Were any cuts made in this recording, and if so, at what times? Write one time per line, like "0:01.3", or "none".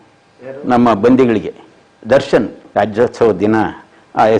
none